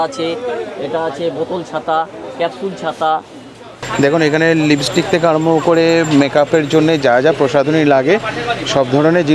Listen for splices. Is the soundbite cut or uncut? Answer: cut